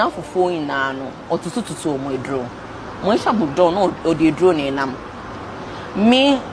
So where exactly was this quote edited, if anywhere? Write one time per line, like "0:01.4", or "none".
none

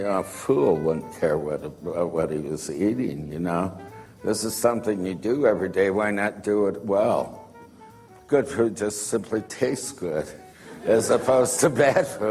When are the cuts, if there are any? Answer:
0:09.0

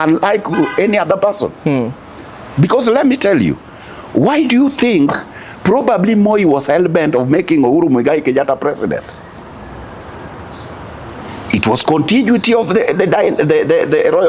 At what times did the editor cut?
none

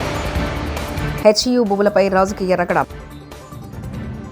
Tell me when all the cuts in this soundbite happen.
none

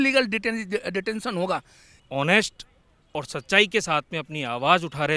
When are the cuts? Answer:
0:02.1

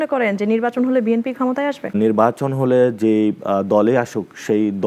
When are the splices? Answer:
0:01.9

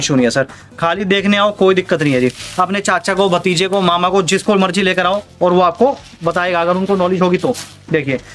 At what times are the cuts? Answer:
none

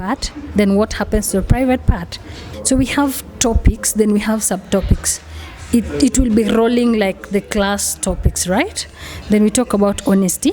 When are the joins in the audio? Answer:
0:02.4

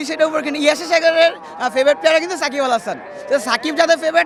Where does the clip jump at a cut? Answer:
none

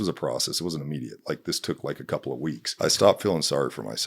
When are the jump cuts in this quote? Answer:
0:02.7

